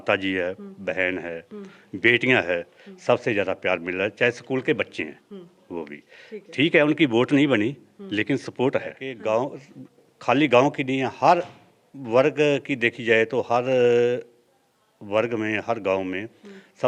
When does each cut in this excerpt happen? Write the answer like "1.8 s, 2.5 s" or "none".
9.1 s